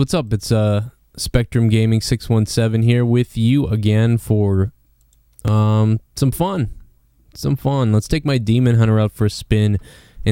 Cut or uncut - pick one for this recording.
uncut